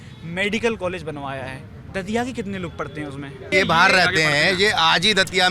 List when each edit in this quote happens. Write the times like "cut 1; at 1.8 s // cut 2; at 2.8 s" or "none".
cut 1; at 3.5 s